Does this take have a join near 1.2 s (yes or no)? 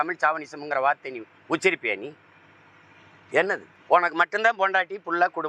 no